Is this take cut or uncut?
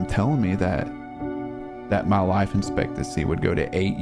cut